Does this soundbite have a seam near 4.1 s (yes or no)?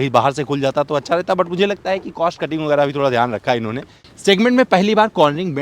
yes